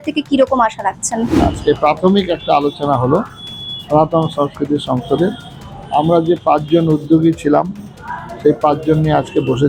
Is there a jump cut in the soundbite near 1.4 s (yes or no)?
yes